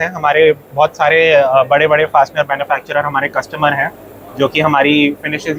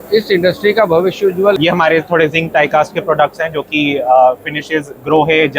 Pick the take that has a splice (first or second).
second